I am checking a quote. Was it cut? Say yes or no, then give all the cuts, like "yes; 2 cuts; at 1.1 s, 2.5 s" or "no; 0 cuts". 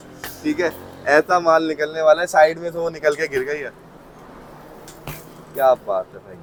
no; 0 cuts